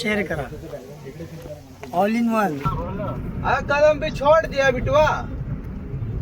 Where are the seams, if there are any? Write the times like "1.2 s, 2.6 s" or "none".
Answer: 3.1 s